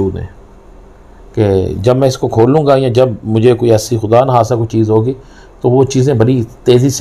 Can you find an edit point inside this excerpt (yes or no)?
no